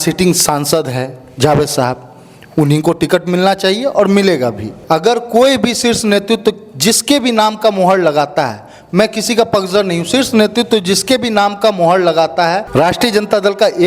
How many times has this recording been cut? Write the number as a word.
two